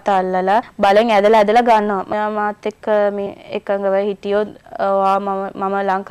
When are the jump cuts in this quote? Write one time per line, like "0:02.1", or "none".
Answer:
0:02.1